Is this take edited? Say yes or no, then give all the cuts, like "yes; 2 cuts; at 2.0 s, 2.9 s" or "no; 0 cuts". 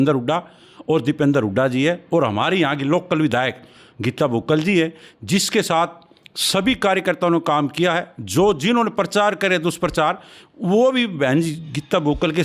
no; 0 cuts